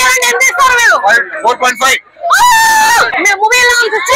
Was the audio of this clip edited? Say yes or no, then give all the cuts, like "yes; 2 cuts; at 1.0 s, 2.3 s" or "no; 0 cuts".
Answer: yes; 1 cut; at 3.1 s